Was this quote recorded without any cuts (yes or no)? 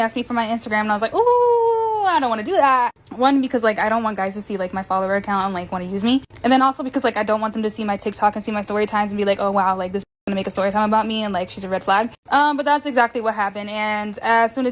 yes